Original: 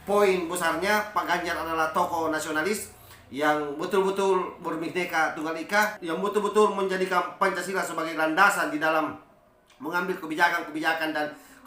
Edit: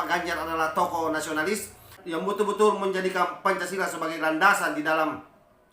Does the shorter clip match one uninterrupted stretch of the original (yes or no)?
no